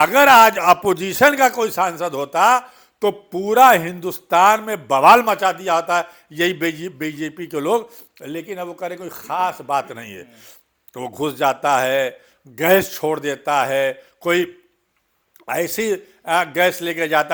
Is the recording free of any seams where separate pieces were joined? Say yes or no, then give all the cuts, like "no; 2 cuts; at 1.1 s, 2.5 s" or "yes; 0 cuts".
yes; 0 cuts